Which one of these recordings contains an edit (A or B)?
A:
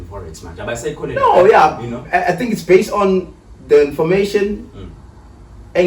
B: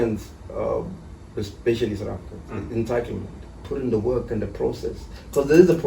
B